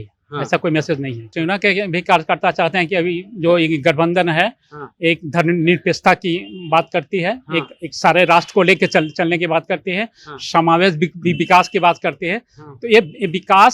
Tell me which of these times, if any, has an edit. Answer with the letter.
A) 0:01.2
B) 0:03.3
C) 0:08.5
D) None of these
A